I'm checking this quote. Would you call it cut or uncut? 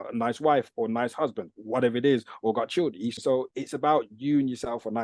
cut